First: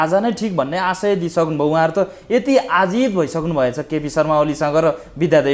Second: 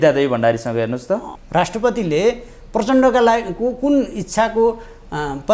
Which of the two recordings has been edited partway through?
second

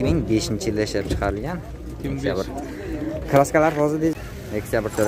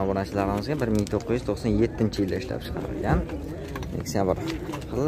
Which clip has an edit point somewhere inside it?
first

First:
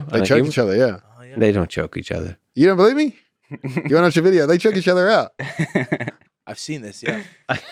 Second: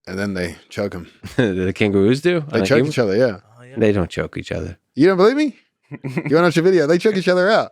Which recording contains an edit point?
second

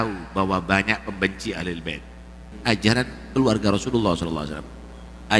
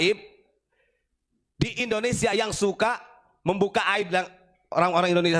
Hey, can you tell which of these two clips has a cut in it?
first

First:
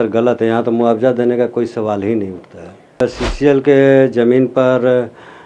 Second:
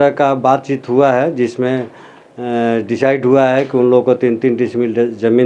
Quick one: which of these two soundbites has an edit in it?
first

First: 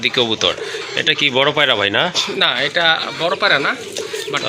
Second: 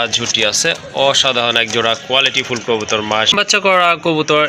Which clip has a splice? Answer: second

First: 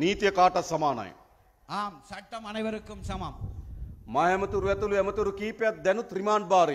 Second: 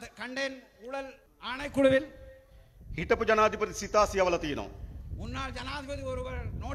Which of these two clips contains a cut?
second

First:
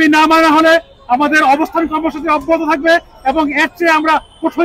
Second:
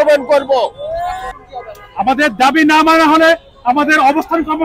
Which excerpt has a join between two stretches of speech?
second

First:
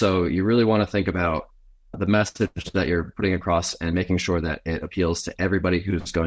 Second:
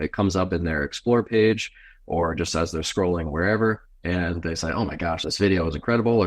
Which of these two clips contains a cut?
second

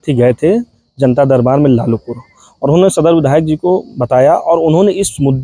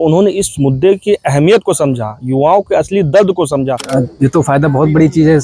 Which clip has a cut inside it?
second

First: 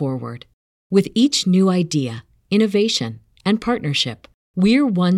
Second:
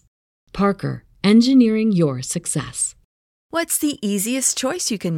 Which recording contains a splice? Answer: second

